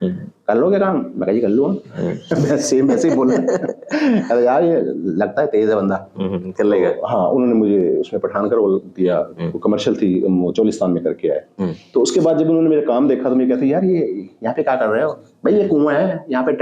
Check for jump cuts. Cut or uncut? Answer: uncut